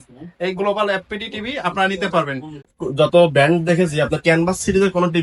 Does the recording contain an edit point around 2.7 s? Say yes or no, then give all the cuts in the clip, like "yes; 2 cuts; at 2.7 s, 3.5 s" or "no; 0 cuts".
yes; 1 cut; at 2.7 s